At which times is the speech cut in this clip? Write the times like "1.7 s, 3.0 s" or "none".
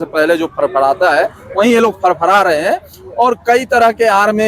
none